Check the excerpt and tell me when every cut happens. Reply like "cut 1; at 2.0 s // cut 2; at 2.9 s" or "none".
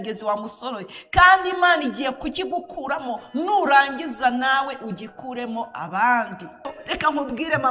cut 1; at 6.7 s